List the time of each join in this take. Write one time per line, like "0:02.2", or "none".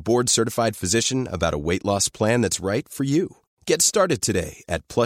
none